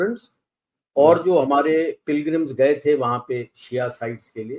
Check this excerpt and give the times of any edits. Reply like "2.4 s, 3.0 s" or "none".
none